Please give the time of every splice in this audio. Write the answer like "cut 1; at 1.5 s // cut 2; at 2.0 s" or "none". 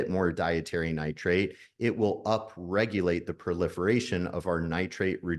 none